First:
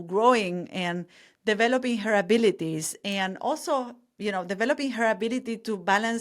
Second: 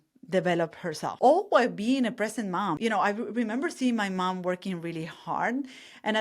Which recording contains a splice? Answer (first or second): second